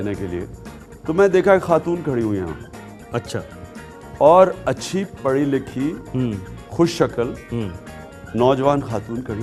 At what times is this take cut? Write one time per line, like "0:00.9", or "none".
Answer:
none